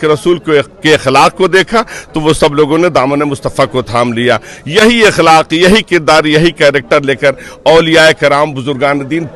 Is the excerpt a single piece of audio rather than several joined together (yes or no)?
yes